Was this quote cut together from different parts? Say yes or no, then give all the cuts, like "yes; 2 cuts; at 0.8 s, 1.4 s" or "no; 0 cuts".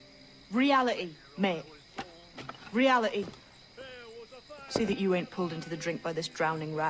yes; 1 cut; at 3.1 s